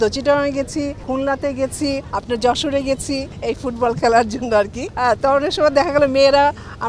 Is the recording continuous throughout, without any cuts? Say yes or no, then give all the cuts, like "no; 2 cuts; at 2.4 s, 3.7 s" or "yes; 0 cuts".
no; 4 cuts; at 1.0 s, 2.1 s, 3.3 s, 4.8 s